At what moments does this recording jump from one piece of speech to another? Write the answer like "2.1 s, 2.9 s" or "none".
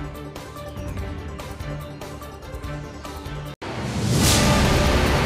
1.0 s, 3.6 s